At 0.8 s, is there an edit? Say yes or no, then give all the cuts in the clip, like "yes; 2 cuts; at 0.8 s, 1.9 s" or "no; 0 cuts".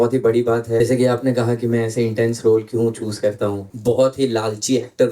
yes; 2 cuts; at 0.8 s, 3.7 s